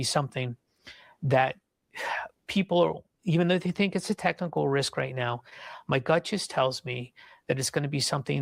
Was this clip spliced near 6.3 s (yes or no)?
no